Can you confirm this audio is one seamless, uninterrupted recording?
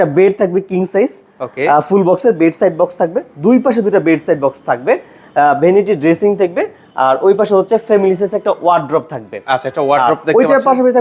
yes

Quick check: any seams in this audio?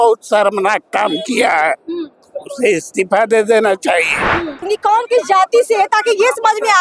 yes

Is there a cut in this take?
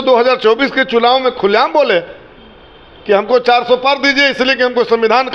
no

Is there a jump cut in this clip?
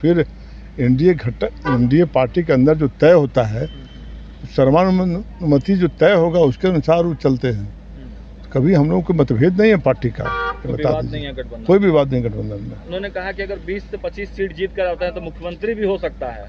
no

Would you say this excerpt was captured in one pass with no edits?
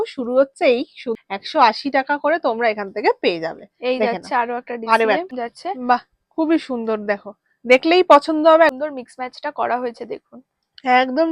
no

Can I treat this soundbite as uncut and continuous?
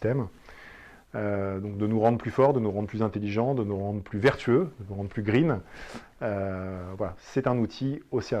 no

